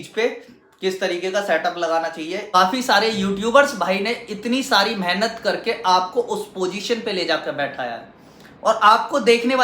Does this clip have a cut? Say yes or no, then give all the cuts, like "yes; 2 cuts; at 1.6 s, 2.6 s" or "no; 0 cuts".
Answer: yes; 1 cut; at 2.4 s